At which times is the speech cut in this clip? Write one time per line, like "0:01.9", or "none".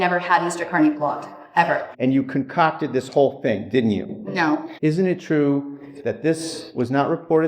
0:01.9
0:04.7